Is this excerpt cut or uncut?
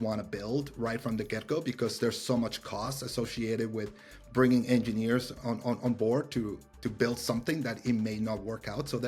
uncut